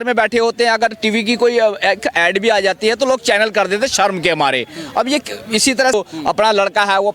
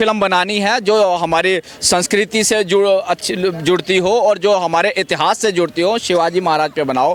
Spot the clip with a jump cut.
first; 1 cut; at 5.9 s

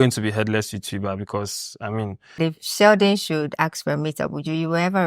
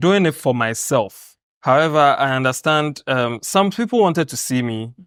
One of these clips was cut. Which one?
first; 1 cut; at 2.4 s

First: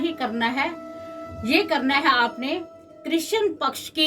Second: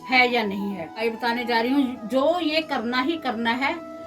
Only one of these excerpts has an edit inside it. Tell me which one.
second; 1 cut; at 0.9 s

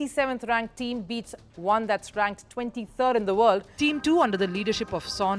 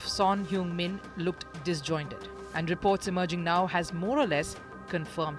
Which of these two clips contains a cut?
first; 1 cut; at 3.8 s

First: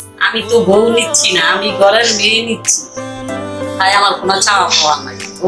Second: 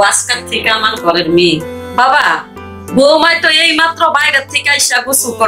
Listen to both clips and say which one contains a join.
second; 1 cut; at 1.8 s

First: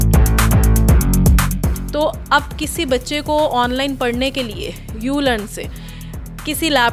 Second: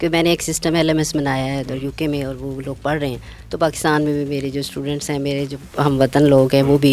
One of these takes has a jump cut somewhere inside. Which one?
first; 1 cut; at 1.4 s

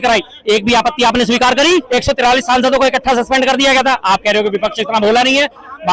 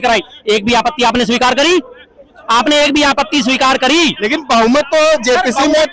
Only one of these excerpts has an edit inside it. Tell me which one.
first; 1 cut; at 1.9 s

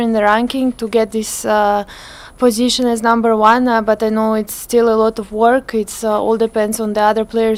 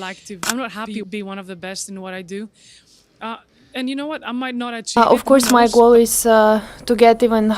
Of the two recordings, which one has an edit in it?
second; 2 cuts; at 1.1 s, 5.0 s

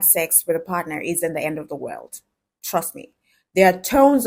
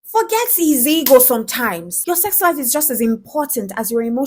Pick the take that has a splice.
second; 1 cut; at 1.9 s

